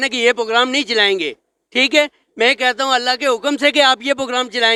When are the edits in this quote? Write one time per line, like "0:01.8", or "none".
none